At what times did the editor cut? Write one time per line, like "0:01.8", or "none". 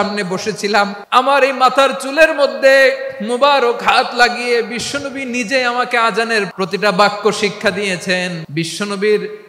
0:01.0
0:06.5
0:08.4